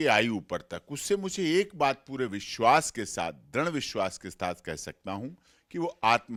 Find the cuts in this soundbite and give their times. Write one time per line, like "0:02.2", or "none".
none